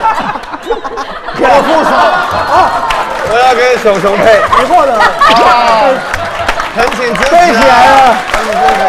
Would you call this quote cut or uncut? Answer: uncut